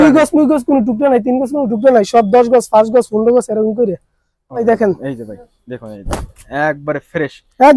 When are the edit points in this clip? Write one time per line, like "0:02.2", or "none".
0:04.6